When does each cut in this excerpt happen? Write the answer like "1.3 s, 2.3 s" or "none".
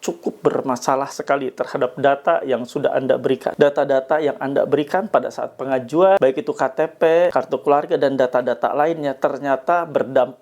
3.5 s, 6.2 s, 7.3 s